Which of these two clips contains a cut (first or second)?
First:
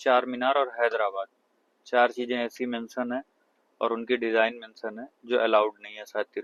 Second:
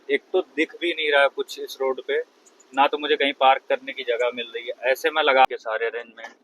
second